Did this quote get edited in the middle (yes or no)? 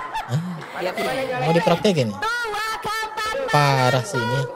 yes